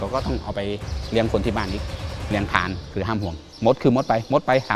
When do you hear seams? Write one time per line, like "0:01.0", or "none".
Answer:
0:03.4